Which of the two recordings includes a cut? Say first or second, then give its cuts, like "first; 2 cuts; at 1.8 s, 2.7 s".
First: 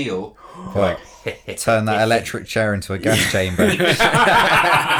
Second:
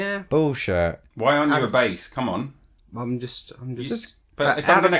second; 1 cut; at 1.1 s